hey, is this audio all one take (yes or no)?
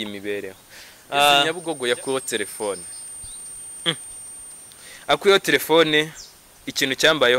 no